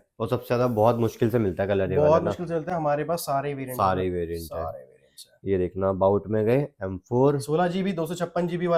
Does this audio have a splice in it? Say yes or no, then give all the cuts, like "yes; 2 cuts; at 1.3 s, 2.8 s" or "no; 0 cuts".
no; 0 cuts